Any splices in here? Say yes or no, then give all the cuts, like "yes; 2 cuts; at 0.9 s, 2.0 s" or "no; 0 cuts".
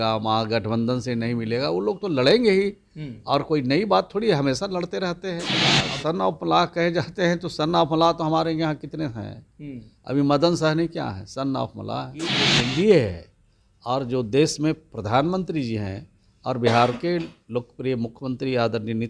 yes; 2 cuts; at 5.6 s, 12.5 s